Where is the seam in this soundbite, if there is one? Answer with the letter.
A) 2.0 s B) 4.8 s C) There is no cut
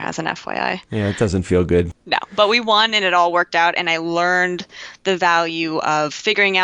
A